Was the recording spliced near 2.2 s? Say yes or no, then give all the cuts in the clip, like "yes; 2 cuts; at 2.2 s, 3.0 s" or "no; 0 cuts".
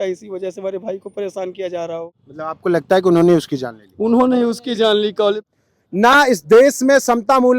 yes; 2 cuts; at 2.2 s, 5.4 s